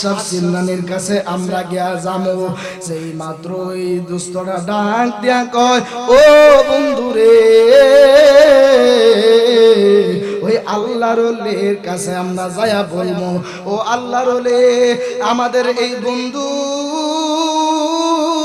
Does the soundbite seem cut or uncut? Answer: uncut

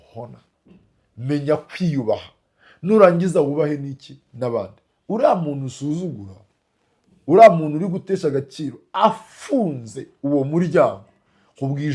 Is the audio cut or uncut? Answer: uncut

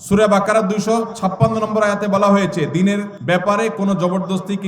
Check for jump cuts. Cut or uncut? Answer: cut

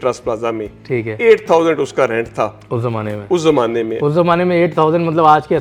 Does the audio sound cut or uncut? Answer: uncut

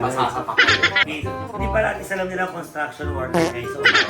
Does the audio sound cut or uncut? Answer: cut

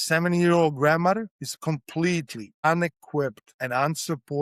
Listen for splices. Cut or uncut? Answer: cut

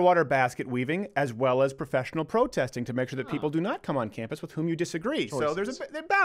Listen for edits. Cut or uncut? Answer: uncut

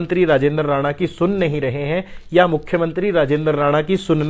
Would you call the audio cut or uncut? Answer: uncut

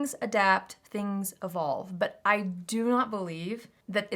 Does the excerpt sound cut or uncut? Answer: uncut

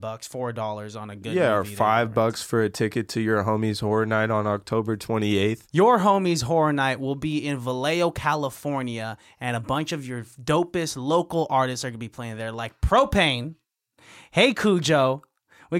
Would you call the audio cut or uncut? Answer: cut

